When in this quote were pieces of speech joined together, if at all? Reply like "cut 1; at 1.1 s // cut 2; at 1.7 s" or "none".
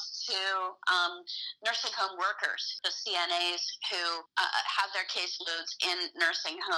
cut 1; at 2.8 s // cut 2; at 4.2 s